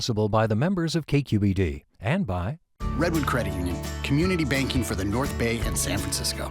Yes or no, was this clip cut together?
yes